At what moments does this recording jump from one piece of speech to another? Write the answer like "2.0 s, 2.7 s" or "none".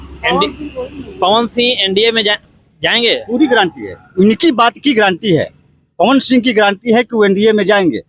none